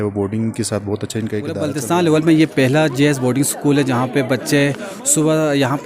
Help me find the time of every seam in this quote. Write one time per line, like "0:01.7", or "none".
0:01.7